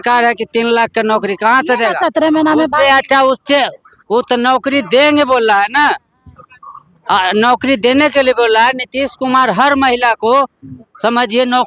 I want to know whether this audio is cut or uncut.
uncut